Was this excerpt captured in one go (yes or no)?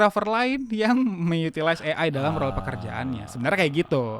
yes